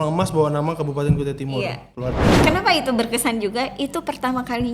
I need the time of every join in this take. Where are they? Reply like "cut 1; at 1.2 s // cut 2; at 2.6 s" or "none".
cut 1; at 2.4 s